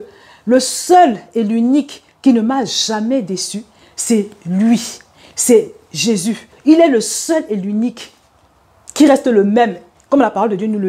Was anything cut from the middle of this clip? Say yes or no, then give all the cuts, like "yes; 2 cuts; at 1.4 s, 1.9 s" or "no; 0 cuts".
yes; 1 cut; at 6.5 s